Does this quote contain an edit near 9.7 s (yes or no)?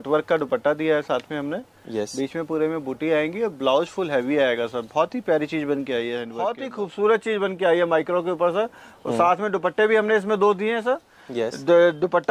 no